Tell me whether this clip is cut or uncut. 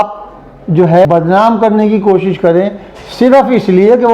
cut